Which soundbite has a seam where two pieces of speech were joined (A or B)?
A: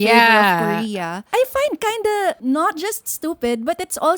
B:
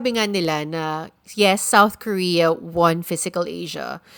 A